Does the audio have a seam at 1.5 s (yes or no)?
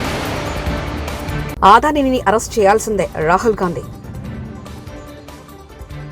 yes